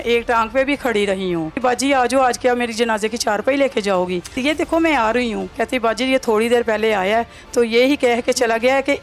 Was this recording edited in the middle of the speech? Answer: yes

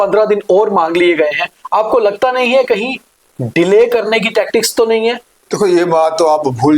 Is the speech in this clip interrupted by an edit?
yes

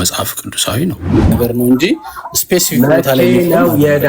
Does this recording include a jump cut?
yes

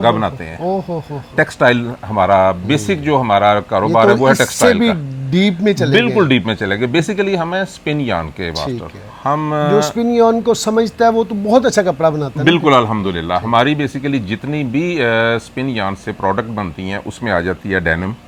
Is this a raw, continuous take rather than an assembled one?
yes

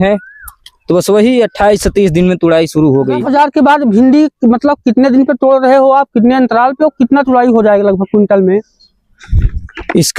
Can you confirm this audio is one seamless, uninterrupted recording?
no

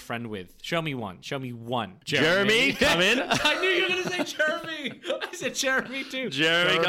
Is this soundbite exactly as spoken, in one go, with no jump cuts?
no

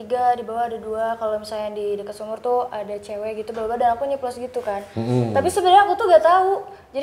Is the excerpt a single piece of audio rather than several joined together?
yes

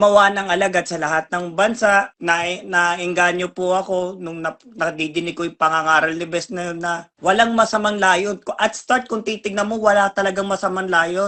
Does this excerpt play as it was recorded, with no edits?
yes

